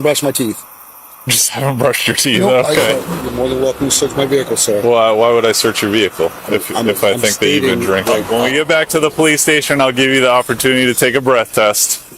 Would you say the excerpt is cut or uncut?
cut